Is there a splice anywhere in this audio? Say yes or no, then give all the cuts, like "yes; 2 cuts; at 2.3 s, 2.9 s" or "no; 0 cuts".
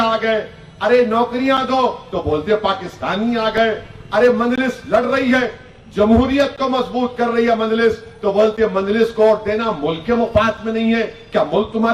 no; 0 cuts